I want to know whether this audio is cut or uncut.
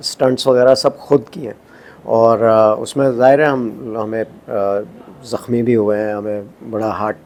uncut